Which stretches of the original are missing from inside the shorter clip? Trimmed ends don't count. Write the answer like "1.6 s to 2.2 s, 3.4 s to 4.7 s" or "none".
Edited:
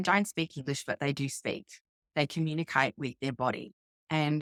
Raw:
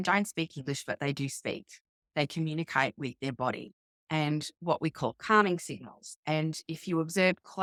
none